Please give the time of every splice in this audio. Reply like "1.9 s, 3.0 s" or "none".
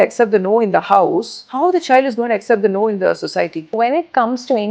1.4 s, 3.6 s